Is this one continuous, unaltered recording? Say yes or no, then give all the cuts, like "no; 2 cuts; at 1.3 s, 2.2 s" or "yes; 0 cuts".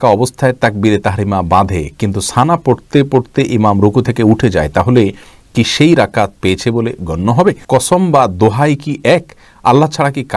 no; 1 cut; at 7.6 s